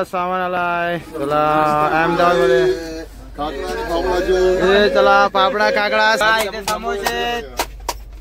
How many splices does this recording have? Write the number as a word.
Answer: one